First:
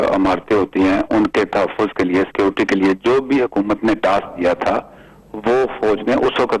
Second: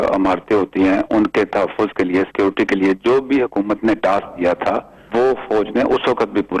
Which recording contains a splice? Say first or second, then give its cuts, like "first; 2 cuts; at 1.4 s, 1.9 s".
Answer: second; 1 cut; at 4.9 s